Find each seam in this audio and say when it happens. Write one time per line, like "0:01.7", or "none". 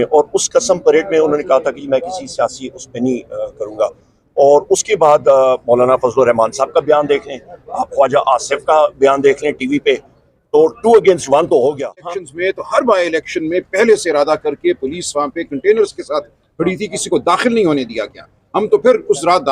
0:12.2